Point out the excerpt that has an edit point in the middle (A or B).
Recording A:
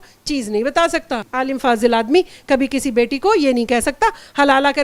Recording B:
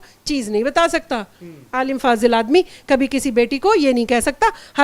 A